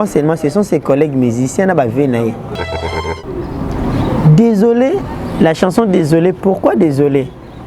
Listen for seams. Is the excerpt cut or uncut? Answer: cut